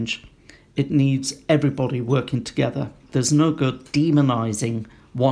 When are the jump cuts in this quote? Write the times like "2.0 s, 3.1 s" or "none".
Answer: 3.0 s